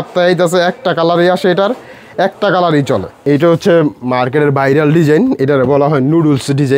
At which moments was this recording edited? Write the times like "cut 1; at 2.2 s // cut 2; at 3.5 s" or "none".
cut 1; at 3.2 s